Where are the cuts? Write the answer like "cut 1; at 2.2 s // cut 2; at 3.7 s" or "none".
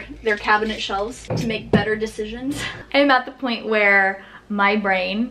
cut 1; at 1.2 s // cut 2; at 2.7 s